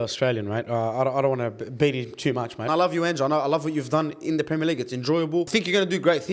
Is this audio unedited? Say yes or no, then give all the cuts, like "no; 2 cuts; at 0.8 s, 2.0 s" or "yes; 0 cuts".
no; 2 cuts; at 2.7 s, 5.5 s